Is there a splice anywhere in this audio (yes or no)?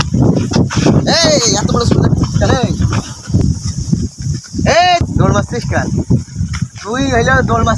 yes